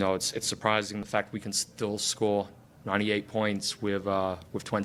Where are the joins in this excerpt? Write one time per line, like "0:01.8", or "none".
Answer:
none